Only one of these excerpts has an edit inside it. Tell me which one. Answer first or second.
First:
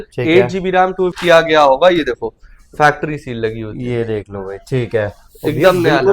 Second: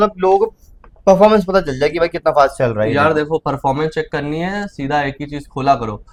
first